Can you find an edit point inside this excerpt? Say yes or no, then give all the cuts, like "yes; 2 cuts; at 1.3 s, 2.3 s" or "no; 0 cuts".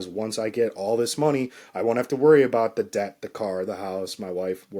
no; 0 cuts